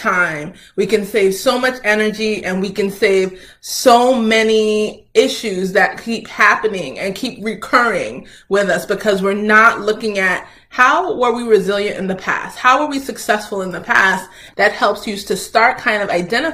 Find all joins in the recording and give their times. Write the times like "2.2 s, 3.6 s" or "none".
14.4 s